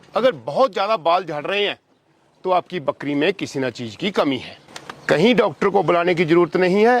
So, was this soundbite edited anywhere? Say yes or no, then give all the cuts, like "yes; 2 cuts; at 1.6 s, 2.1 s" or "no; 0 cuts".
no; 0 cuts